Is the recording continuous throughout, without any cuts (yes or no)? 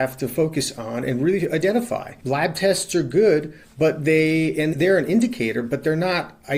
no